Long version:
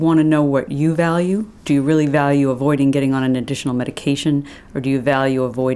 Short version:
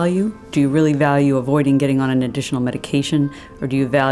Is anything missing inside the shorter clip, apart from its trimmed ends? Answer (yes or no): no